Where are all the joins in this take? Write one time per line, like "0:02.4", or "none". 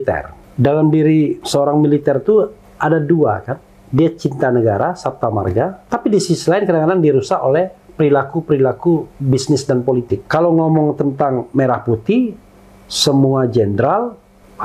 0:05.8
0:10.2